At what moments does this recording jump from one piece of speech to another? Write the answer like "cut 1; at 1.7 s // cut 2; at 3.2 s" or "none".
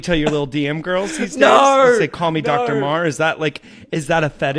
none